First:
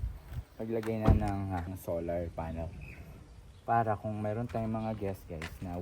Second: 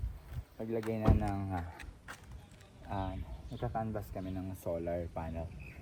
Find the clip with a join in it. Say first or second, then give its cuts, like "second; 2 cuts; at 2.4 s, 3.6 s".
first; 1 cut; at 1.7 s